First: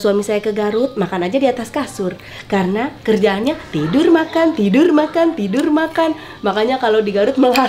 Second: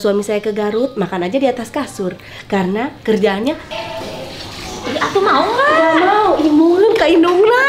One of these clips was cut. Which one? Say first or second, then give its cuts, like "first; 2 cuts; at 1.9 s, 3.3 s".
second; 1 cut; at 3.6 s